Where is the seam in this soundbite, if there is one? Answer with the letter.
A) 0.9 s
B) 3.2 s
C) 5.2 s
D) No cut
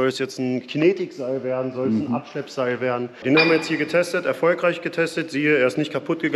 B